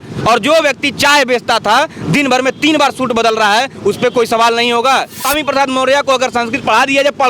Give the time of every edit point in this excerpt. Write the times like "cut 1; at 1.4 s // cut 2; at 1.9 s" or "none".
cut 1; at 5.1 s